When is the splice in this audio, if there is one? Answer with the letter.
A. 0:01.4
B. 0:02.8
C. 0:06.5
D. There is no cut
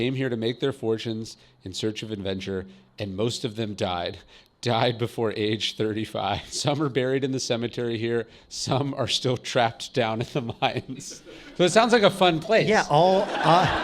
C